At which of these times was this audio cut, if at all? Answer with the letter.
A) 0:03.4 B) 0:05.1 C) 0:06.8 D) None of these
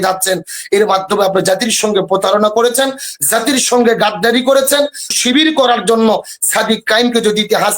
B